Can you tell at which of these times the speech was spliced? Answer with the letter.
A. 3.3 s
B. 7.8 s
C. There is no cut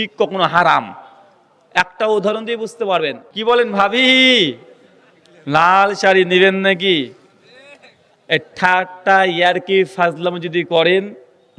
A